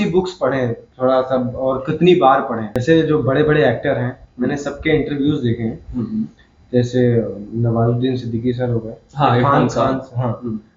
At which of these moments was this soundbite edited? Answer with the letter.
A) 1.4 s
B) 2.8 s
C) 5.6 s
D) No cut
B